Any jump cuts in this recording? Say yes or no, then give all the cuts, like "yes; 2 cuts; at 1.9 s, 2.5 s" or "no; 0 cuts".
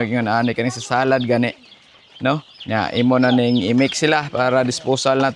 no; 0 cuts